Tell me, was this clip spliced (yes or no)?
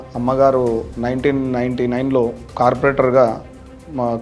yes